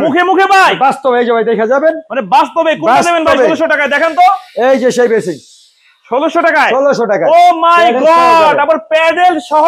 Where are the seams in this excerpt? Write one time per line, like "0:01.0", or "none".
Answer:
none

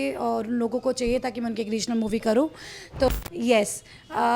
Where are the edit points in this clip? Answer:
0:03.1

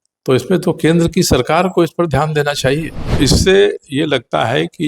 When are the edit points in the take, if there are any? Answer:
0:03.1

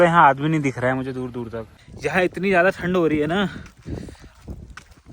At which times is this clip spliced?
0:01.7

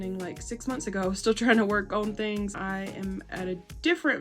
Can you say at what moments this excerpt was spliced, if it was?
0:02.5

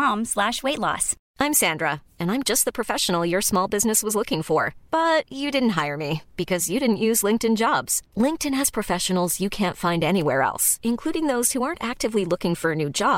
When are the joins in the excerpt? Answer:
0:01.2

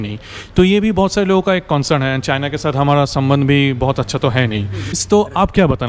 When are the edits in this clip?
0:04.9

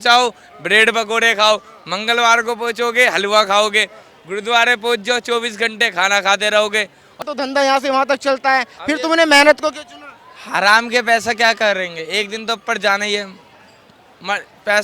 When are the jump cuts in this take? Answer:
0:07.1

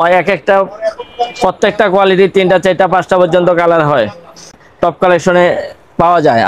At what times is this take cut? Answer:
0:04.6

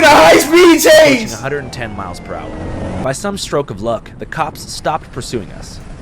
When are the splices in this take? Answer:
0:03.0

